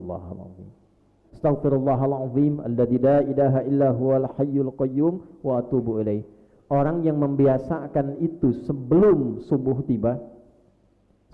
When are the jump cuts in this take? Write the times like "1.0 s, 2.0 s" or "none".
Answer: 1.2 s